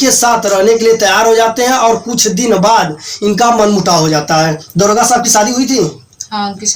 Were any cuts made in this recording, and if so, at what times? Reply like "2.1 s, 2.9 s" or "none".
none